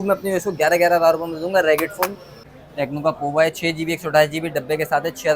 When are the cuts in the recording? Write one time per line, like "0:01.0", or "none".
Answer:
0:02.3